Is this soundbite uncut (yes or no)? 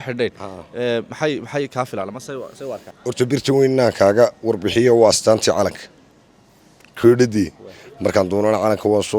no